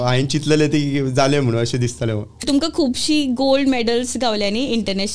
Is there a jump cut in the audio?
yes; 1 cut; at 2.3 s

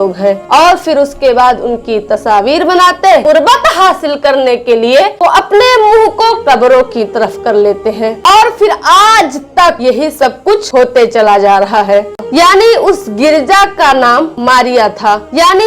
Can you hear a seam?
yes; 3 cuts; at 3.2 s, 8.2 s, 12.1 s

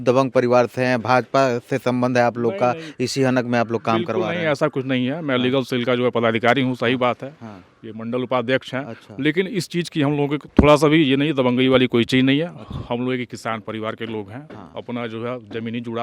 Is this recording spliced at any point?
no; 0 cuts

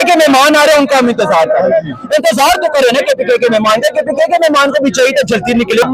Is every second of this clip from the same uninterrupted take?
yes; 0 cuts

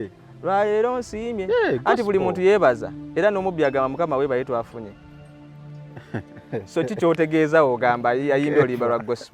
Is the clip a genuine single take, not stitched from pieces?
yes; 0 cuts

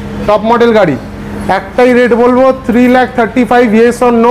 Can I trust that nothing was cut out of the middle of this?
yes; 0 cuts

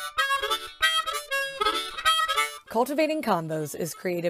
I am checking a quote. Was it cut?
no; 0 cuts

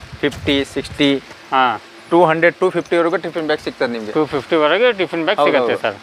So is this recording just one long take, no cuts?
yes; 0 cuts

